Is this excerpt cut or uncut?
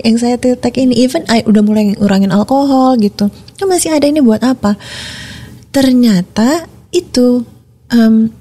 uncut